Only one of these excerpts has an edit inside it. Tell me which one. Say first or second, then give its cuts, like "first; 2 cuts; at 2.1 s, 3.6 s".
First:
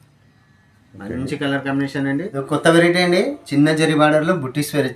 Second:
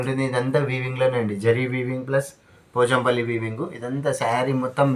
first; 1 cut; at 2.3 s